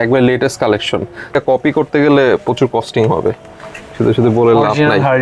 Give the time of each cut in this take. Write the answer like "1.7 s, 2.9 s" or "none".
1.3 s